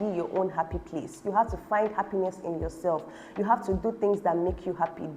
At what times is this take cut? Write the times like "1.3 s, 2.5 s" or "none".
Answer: none